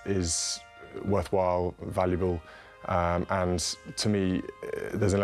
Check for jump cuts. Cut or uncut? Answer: uncut